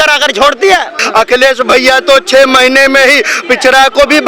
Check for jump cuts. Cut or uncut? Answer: cut